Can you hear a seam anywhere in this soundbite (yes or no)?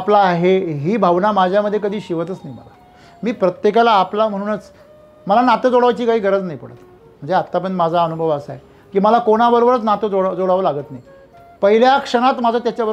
no